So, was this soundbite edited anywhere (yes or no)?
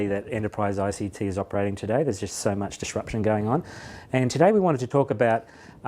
no